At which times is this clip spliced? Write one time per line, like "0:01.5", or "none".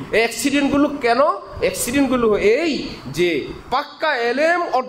none